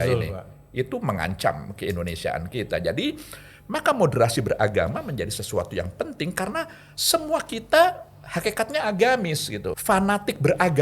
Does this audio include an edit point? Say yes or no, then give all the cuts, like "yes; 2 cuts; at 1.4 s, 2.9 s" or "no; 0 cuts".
yes; 1 cut; at 9.7 s